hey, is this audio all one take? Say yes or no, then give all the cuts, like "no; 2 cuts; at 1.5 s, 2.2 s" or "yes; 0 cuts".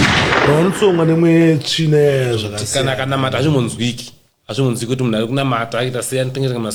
yes; 0 cuts